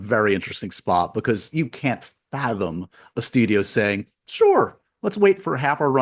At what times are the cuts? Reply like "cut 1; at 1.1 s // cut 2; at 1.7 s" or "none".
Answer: none